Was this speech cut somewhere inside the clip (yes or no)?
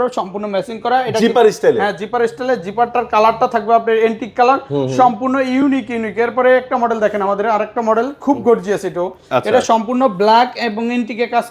no